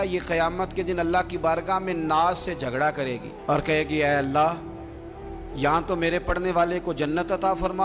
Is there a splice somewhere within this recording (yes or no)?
no